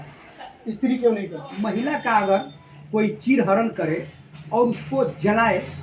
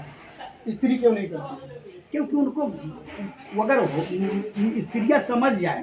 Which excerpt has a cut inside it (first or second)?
first